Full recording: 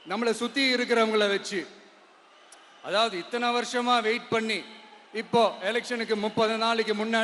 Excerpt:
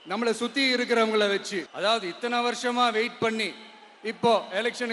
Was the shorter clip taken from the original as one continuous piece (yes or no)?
no